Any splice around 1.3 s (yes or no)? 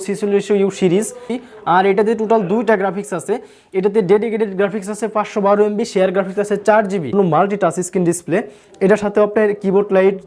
yes